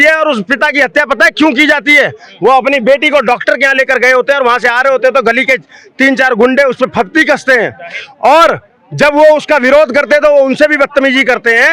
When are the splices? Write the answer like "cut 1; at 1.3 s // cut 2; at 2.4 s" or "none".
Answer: none